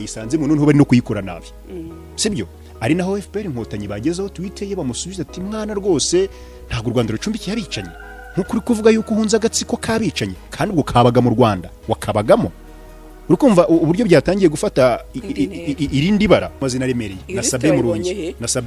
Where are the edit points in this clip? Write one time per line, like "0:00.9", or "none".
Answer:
0:16.6